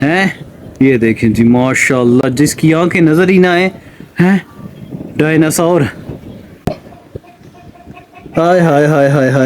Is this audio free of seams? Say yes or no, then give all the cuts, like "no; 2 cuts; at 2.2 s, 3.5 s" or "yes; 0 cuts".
yes; 0 cuts